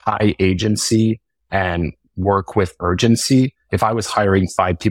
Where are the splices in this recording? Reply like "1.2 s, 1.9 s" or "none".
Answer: 3.7 s